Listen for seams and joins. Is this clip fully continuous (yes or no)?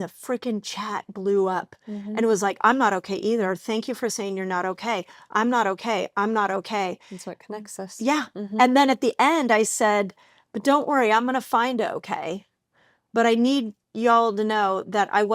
yes